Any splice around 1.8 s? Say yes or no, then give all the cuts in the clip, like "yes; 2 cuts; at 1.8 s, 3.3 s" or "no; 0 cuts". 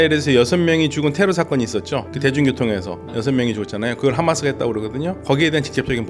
no; 1 cut; at 5.2 s